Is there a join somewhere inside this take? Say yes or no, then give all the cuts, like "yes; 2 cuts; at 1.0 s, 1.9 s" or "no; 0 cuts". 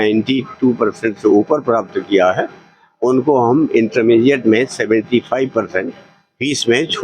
no; 0 cuts